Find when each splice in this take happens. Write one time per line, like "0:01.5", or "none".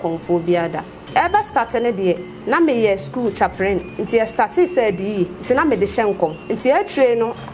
0:01.1
0:02.3
0:03.9
0:05.4
0:06.4